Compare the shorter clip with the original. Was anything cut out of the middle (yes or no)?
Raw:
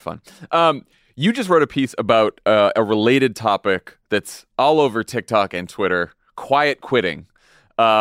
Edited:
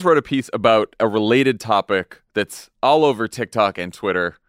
yes